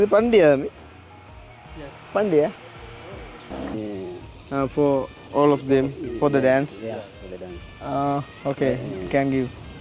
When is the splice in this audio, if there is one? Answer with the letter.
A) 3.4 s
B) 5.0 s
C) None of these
A